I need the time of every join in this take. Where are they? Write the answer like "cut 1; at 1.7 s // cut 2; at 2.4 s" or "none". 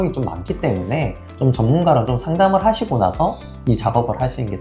none